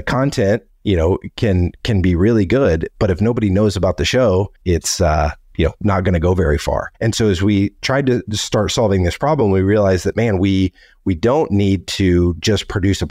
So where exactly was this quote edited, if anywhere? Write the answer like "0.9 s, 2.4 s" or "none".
4.6 s, 6.9 s

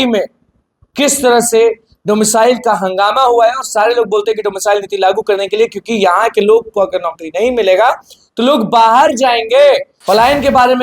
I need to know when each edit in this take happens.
9.9 s

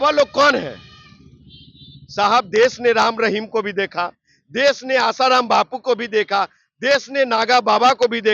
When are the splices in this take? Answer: none

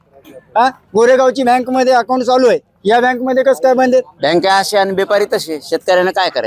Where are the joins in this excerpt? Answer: 4.1 s

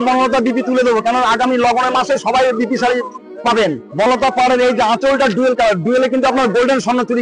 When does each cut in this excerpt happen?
4.1 s

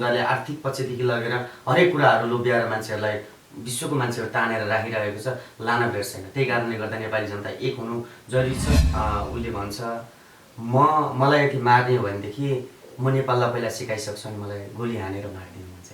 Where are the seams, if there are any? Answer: 8.8 s

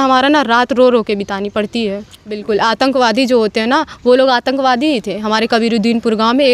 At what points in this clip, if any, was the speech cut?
2.3 s

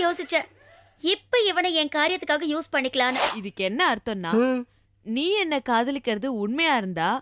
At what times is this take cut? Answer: 3.4 s

